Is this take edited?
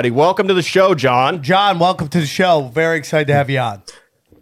no; 0 cuts

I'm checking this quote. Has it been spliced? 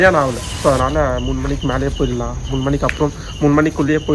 no; 0 cuts

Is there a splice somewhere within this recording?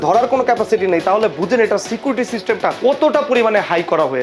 yes; 1 cut; at 2.8 s

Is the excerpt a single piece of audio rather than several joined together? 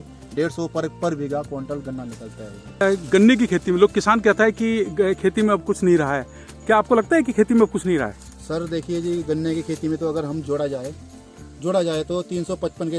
no; 1 cut; at 2.8 s

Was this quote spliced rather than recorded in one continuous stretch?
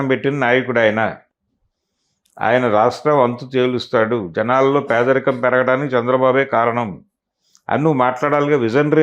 no; 0 cuts

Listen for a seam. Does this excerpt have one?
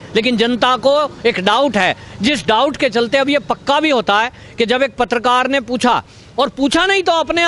no; 0 cuts

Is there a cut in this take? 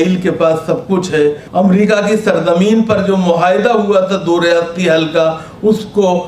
yes; 1 cut; at 1.4 s

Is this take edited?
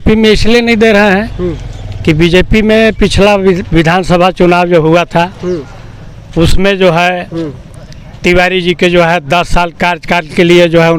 no; 0 cuts

